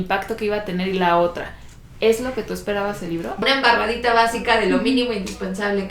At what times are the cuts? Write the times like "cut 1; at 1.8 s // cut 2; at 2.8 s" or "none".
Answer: cut 1; at 3.4 s